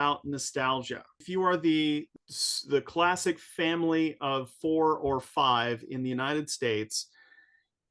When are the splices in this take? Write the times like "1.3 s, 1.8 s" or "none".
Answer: 1.2 s, 2.2 s